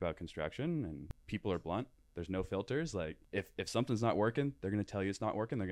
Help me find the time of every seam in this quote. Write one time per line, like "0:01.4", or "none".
0:01.1
0:03.2